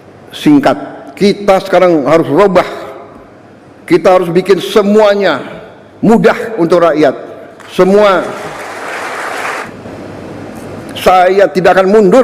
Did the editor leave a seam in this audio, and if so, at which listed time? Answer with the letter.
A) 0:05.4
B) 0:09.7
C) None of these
B